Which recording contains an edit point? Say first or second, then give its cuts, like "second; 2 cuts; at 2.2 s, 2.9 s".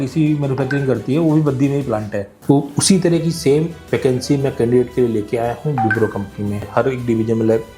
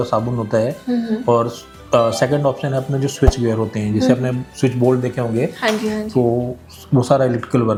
first; 1 cut; at 6.7 s